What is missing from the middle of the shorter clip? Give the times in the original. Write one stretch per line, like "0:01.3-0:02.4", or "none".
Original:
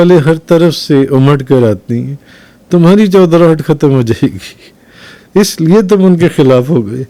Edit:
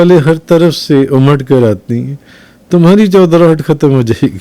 none